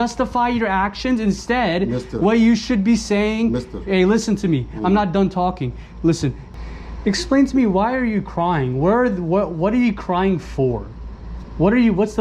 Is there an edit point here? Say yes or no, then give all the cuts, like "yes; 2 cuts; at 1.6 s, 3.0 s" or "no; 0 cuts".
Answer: yes; 1 cut; at 6.4 s